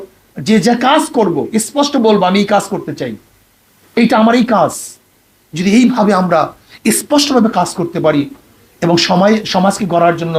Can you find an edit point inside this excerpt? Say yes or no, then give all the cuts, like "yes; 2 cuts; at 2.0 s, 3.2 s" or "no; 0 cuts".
no; 0 cuts